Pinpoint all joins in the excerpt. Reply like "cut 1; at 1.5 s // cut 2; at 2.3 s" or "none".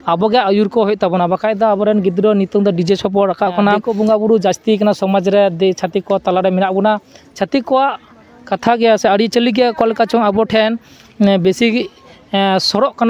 cut 1; at 3.9 s